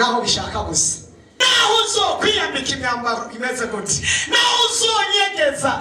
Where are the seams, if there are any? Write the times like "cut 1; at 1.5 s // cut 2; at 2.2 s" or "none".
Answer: cut 1; at 1.4 s